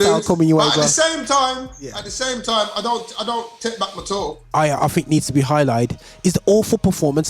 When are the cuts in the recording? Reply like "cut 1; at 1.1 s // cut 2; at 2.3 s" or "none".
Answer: cut 1; at 4.5 s